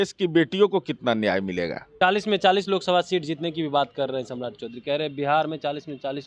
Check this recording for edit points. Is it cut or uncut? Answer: cut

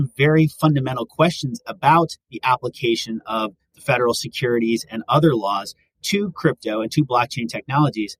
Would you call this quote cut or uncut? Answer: uncut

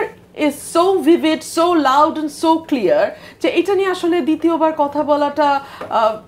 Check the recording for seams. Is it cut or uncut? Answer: uncut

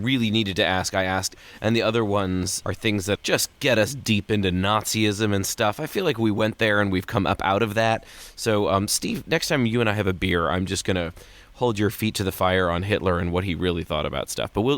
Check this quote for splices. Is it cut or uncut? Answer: cut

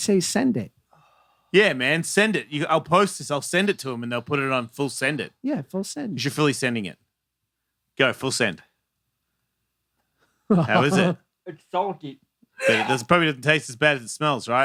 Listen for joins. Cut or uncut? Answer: uncut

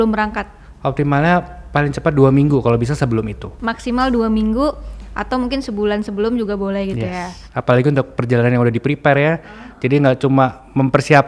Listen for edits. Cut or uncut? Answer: uncut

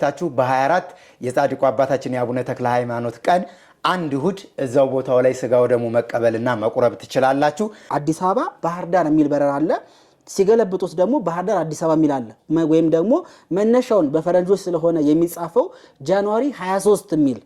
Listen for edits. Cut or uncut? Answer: cut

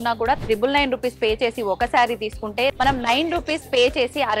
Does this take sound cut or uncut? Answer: cut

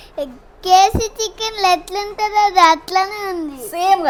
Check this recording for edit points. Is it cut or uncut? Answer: uncut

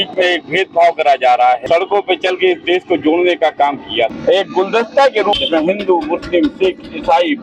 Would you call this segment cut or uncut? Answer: cut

